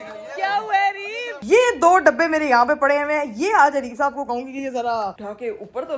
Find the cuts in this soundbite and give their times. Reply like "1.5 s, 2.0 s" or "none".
1.3 s